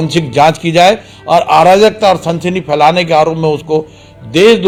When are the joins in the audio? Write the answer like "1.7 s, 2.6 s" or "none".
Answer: none

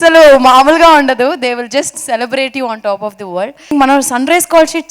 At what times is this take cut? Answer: 3.7 s

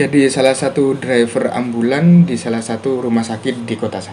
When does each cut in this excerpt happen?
none

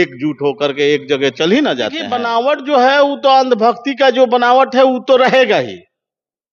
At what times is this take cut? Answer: 2.1 s

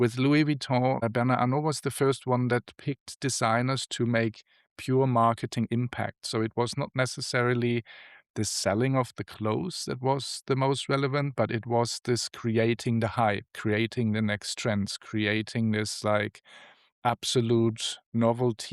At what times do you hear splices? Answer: 1.0 s

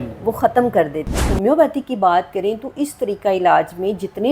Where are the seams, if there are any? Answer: 1.3 s

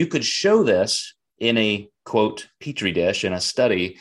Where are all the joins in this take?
none

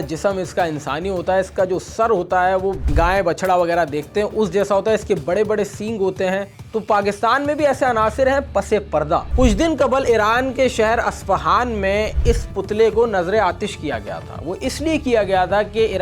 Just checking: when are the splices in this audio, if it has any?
2.8 s, 6.5 s, 9.3 s

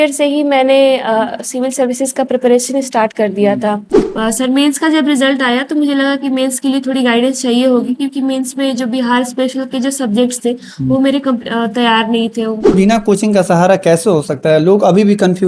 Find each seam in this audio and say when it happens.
4.0 s, 12.7 s

